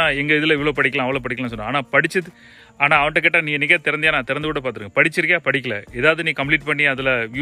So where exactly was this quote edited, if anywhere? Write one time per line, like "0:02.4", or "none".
none